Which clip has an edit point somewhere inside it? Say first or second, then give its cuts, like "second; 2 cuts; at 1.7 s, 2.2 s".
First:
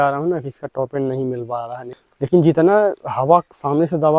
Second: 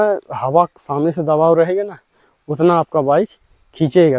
first; 1 cut; at 1.8 s